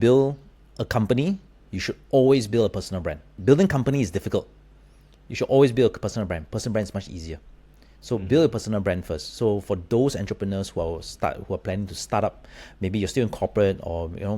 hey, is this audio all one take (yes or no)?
no